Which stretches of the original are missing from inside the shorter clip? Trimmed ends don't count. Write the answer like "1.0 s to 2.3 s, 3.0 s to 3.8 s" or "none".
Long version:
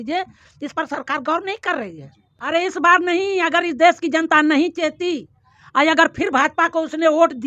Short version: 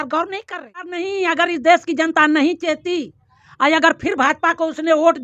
2.1 s to 3.1 s